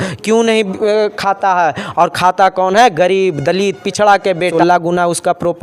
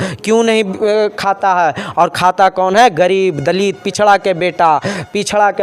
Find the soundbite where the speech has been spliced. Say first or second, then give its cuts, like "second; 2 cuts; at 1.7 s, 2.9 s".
first; 1 cut; at 4.5 s